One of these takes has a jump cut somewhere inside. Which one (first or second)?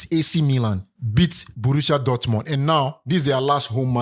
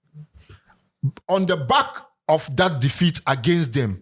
first